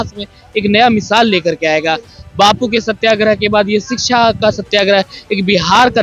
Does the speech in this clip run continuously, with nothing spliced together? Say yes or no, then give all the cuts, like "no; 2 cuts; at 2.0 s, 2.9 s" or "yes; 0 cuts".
yes; 0 cuts